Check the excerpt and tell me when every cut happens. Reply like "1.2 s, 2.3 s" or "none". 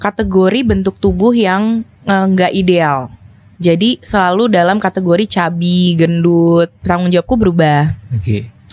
6.8 s